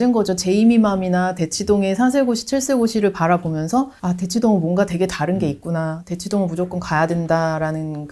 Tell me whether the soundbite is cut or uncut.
uncut